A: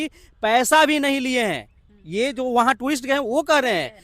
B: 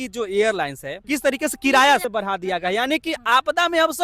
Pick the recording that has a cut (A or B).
B